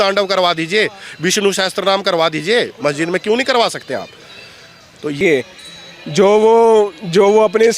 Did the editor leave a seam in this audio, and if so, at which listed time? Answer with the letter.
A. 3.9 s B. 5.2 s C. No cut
B